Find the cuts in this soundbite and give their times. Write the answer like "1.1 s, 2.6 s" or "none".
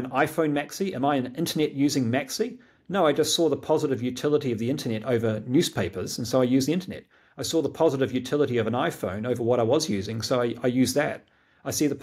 none

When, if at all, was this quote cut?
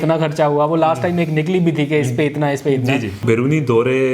3.2 s

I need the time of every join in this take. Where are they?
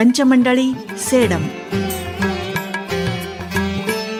none

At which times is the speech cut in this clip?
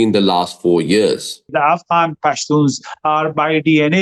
1.5 s

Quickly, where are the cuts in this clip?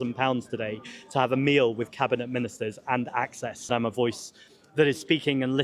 3.6 s

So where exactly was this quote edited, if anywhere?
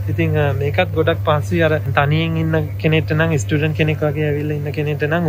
1.9 s

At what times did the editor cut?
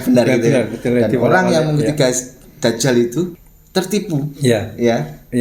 3.3 s

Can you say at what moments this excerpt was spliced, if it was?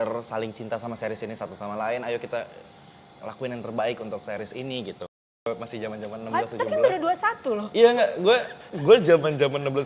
5.5 s

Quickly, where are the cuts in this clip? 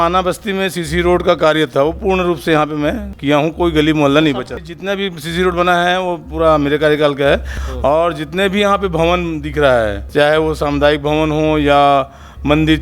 3.1 s, 4.6 s, 7.6 s, 10.0 s

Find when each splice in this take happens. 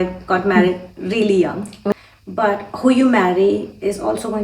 1.9 s

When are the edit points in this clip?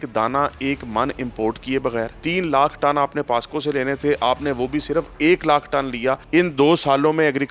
2.2 s, 6.2 s

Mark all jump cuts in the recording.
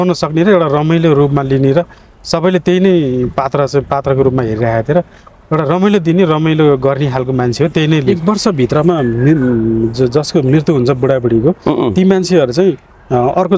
8.0 s

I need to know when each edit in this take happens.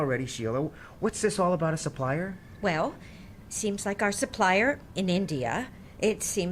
none

